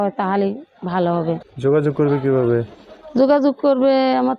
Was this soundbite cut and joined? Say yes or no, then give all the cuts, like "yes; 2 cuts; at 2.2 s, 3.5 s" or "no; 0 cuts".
yes; 1 cut; at 1.5 s